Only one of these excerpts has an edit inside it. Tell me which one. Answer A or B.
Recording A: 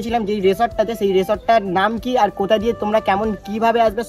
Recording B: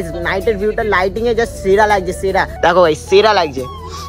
B